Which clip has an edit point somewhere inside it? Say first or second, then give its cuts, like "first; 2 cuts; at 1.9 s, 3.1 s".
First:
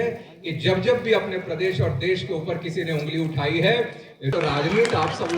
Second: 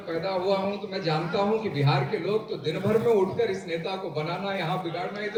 first; 1 cut; at 4.2 s